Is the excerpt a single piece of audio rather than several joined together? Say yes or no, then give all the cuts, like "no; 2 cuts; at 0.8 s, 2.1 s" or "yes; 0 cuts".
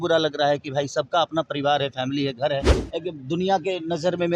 no; 1 cut; at 2.8 s